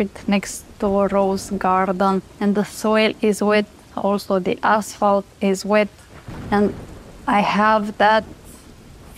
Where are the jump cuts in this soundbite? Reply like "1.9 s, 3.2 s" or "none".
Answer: 2.3 s